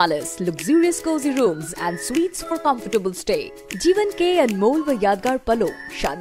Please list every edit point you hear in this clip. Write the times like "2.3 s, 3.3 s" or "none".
none